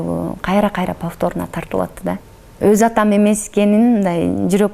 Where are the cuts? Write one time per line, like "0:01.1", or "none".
0:02.3